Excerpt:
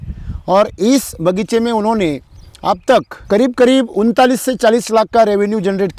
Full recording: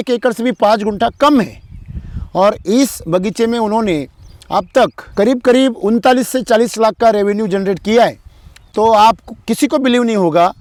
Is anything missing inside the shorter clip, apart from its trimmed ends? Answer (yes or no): no